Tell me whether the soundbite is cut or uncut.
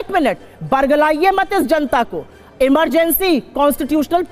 uncut